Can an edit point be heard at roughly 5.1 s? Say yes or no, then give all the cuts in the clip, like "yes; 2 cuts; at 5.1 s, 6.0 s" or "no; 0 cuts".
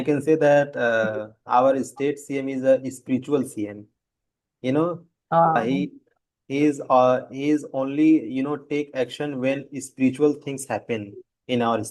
no; 0 cuts